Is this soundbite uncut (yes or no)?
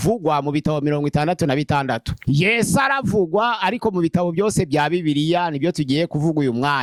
yes